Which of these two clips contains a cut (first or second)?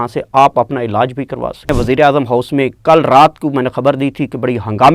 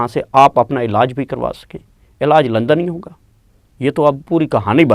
first